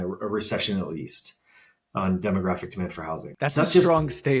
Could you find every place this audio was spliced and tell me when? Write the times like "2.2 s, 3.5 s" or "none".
3.3 s